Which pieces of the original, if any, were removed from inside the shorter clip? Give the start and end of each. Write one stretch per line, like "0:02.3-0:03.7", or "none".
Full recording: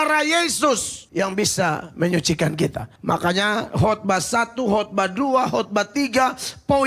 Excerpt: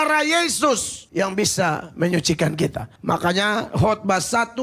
none